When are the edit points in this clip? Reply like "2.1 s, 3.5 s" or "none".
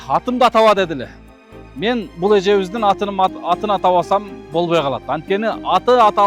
none